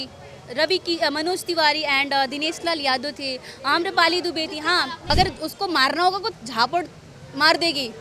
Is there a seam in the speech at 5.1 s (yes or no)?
yes